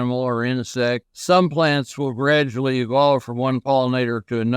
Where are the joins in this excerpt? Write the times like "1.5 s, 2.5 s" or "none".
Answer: 1.1 s